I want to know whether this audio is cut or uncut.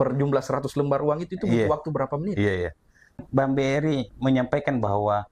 cut